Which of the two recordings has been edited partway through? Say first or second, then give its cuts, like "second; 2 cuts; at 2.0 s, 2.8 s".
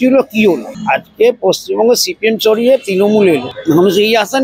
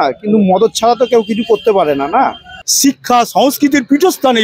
second; 1 cut; at 2.6 s